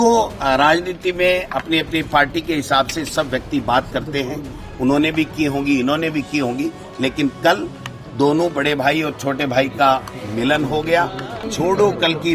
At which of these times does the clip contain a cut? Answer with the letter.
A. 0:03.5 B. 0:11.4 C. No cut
B